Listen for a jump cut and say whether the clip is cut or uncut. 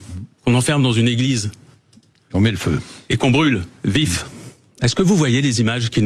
uncut